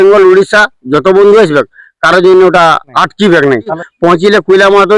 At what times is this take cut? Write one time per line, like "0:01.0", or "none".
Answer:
0:02.9
0:03.8